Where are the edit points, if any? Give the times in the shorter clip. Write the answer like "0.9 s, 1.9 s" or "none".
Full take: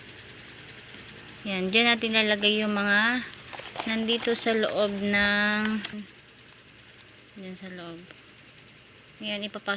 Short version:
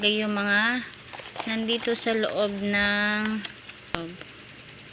4.0 s